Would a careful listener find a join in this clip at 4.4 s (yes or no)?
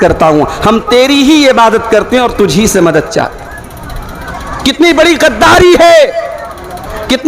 yes